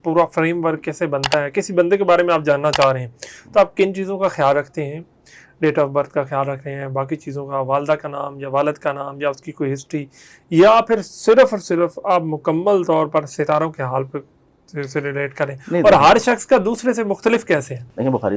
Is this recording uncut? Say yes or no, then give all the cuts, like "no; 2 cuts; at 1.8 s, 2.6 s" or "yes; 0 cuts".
yes; 0 cuts